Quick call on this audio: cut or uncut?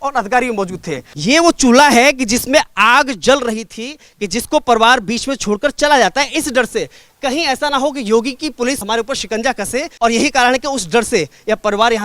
cut